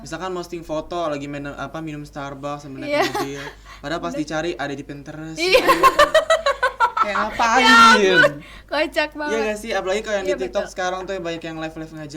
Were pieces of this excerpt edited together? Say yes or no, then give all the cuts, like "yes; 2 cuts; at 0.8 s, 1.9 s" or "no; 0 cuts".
no; 0 cuts